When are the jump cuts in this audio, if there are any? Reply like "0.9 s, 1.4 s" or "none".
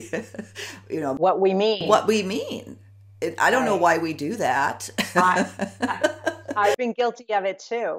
none